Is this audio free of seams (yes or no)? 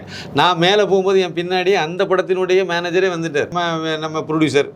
no